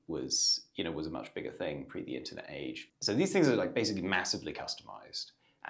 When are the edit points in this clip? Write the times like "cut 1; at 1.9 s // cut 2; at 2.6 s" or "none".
cut 1; at 2.8 s